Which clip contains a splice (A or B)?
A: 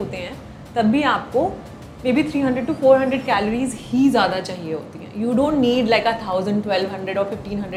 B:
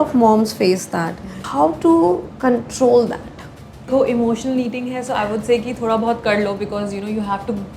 B